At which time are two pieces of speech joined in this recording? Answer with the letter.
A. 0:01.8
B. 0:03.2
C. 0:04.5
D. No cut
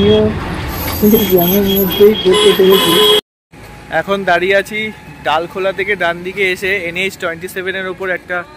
B